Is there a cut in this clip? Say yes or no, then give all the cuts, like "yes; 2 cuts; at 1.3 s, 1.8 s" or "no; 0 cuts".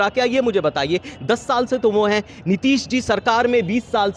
no; 0 cuts